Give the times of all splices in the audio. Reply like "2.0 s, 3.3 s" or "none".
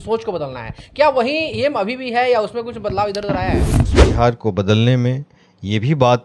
3.8 s